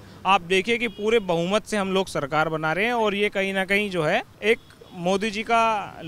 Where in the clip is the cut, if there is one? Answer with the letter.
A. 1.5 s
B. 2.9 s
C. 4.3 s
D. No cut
C